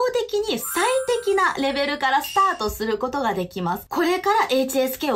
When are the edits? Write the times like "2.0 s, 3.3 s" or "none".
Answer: 3.8 s